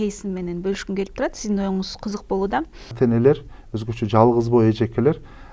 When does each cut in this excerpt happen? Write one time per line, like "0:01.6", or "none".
0:02.9